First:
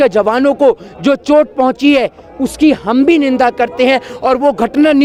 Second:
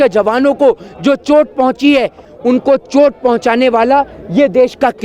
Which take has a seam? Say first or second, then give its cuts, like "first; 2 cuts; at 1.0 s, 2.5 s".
second; 1 cut; at 2.3 s